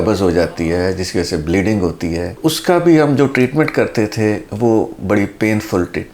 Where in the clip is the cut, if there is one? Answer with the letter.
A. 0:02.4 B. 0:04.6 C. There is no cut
C